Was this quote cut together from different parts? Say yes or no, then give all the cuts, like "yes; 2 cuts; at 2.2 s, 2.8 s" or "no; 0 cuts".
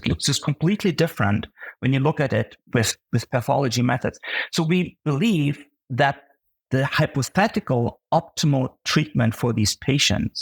yes; 1 cut; at 5.0 s